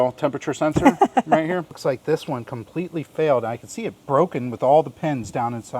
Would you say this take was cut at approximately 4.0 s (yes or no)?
no